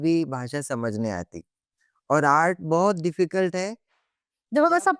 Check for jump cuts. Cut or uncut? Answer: uncut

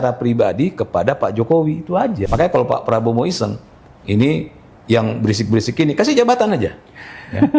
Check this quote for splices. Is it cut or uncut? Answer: cut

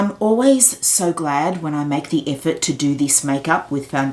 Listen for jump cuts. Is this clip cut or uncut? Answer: uncut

